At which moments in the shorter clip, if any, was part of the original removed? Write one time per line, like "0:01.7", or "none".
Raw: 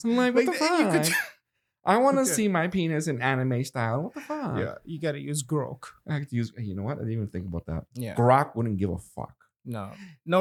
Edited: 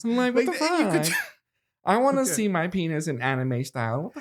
none